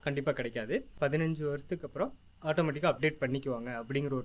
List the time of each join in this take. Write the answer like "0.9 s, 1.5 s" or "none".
0.9 s